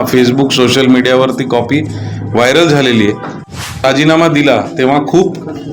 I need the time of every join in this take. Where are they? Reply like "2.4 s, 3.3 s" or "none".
3.4 s